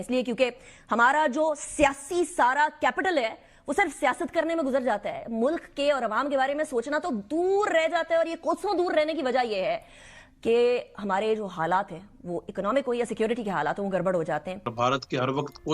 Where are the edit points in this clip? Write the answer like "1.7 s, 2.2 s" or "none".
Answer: 14.6 s